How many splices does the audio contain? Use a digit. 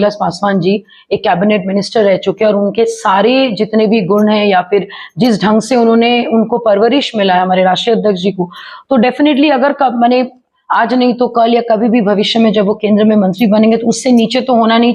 0